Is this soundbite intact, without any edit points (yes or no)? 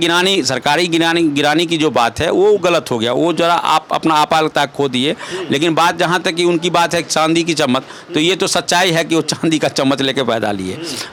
yes